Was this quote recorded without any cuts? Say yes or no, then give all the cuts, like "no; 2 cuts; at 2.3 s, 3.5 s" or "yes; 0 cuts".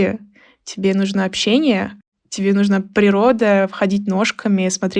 yes; 0 cuts